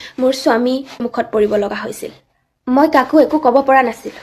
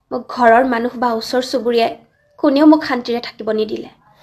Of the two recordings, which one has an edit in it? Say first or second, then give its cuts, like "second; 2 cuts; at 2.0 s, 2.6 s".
first; 1 cut; at 1.1 s